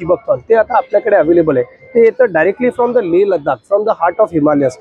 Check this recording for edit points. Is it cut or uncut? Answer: uncut